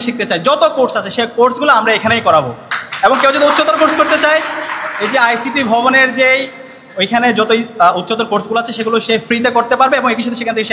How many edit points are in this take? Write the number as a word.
zero